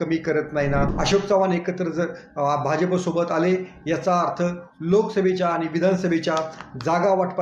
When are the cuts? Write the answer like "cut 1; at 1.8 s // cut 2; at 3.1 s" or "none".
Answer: cut 1; at 0.9 s